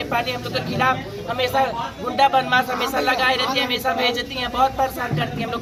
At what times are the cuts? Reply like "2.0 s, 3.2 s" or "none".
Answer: none